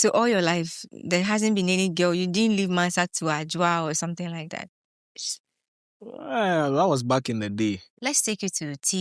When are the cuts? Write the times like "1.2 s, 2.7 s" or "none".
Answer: 7.9 s